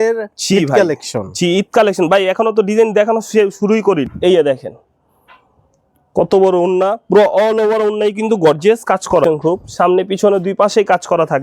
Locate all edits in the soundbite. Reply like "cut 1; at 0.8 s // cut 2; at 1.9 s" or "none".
cut 1; at 4.1 s // cut 2; at 9.2 s